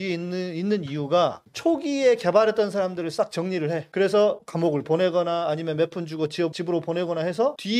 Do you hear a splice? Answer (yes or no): no